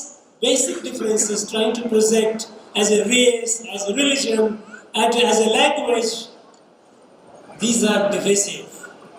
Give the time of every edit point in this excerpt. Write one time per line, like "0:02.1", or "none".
none